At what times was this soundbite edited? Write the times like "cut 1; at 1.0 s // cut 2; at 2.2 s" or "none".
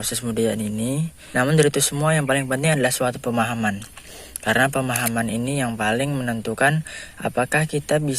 cut 1; at 1.2 s